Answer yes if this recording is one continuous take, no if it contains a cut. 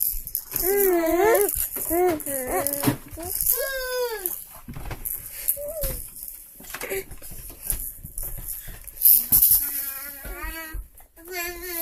no